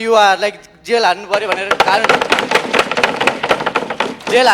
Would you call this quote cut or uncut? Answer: uncut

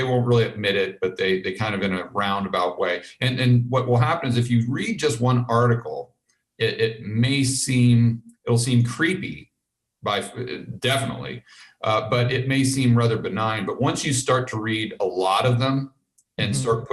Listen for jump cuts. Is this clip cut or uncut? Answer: uncut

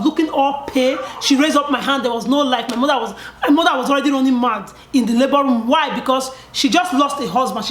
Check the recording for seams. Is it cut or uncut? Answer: uncut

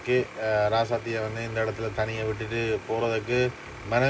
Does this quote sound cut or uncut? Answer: uncut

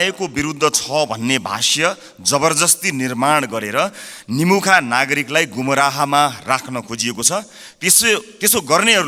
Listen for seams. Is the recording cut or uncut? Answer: uncut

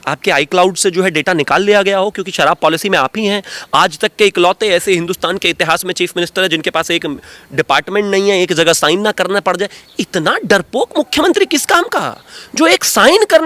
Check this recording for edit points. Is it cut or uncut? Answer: uncut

